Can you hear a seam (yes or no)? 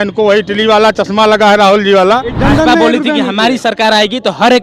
yes